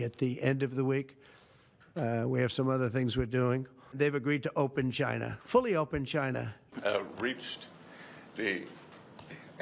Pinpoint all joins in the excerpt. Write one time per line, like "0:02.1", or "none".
0:06.6